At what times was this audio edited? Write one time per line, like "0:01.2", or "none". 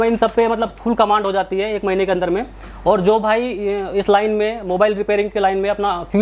none